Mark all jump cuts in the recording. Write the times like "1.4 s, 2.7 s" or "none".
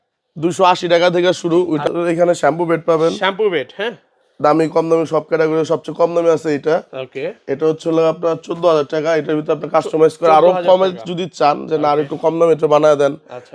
1.8 s